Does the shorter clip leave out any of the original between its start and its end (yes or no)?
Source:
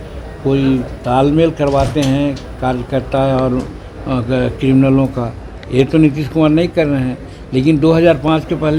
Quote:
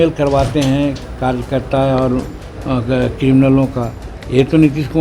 no